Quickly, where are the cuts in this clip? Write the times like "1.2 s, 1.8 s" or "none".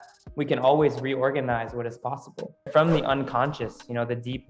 2.6 s

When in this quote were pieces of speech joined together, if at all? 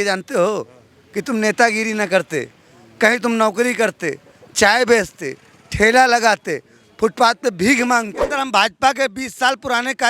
8.2 s

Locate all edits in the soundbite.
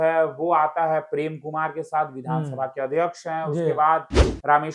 none

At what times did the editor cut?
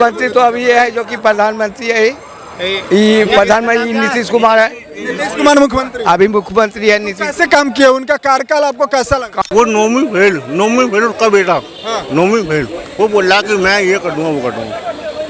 9.4 s

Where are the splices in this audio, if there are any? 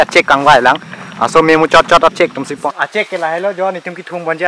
2.5 s

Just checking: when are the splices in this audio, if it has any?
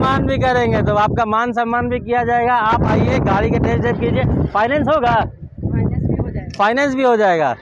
none

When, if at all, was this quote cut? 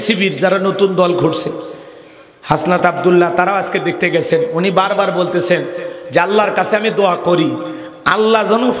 none

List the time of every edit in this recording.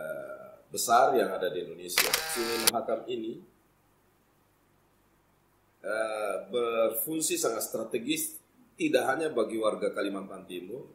2.2 s

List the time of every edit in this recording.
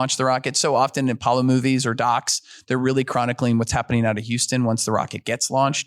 none

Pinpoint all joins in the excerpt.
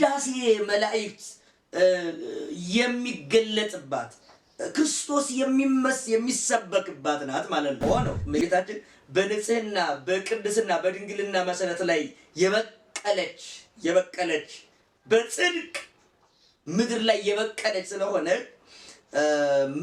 7.8 s

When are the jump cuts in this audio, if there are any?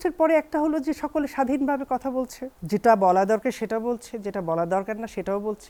none

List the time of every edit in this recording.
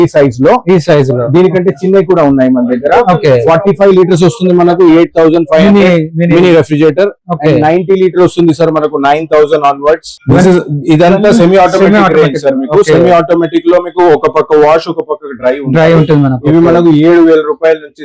10.2 s

